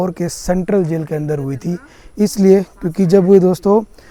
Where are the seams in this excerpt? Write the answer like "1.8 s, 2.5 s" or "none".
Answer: none